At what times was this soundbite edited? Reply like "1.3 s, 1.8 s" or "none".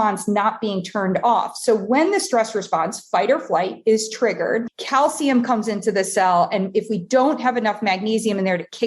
4.8 s